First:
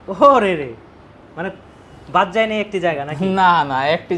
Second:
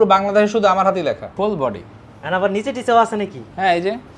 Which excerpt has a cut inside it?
second; 1 cut; at 1.3 s

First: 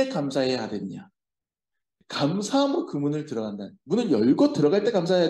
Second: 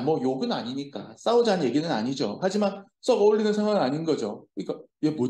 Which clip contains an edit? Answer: first; 1 cut; at 2.0 s

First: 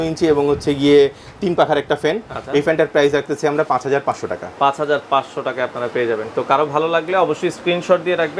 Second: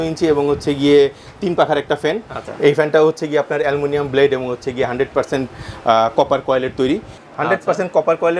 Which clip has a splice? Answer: second; 2 cuts; at 2.4 s, 7.2 s

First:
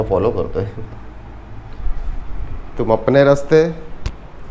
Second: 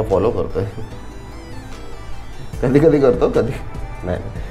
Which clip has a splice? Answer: first; 1 cut; at 1.7 s

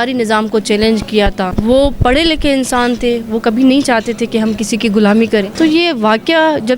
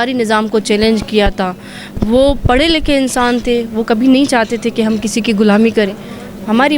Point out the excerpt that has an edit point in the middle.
first; 2 cuts; at 1.5 s, 5.5 s

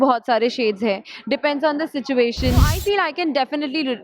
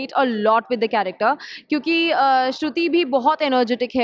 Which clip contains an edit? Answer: first; 1 cut; at 2.7 s

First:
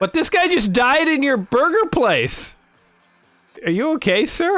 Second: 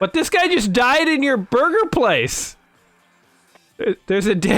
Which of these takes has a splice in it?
first; 1 cut; at 3.6 s

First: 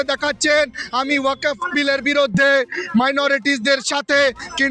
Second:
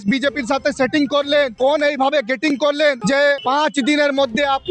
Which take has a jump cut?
second; 2 cuts; at 1.5 s, 3.2 s

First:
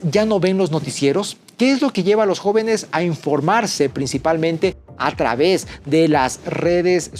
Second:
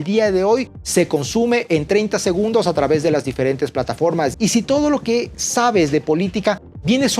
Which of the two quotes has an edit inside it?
second; 1 cut; at 4.3 s

